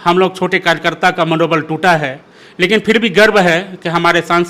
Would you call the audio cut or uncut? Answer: uncut